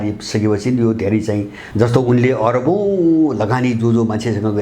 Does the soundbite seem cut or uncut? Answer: cut